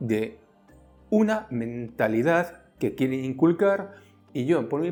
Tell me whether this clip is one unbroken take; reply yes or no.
yes